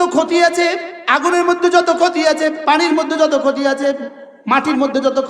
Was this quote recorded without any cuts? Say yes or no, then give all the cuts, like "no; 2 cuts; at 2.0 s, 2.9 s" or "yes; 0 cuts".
no; 1 cut; at 0.9 s